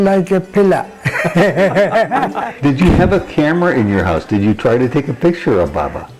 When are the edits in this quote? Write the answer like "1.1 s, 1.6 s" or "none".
2.4 s